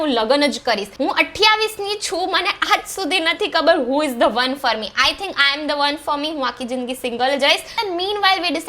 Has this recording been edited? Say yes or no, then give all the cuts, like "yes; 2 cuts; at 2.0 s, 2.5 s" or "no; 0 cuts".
yes; 2 cuts; at 0.9 s, 7.7 s